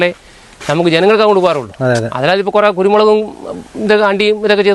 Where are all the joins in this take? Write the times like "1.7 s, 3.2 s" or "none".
none